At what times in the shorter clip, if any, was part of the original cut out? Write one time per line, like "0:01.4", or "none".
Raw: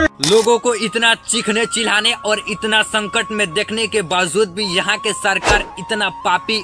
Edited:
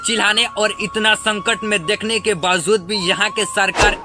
none